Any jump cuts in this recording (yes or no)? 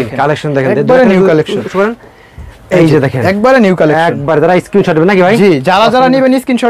no